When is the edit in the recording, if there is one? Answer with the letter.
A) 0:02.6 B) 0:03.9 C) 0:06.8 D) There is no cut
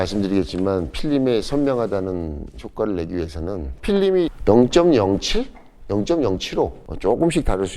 C